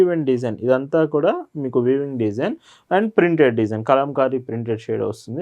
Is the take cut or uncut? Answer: uncut